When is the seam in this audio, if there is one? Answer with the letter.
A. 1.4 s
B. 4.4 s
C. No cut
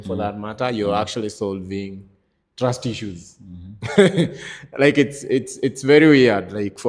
C